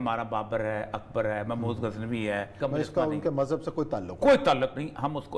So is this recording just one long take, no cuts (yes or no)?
no